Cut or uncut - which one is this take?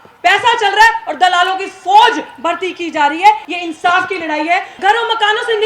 cut